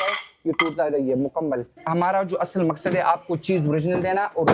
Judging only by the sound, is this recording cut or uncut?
cut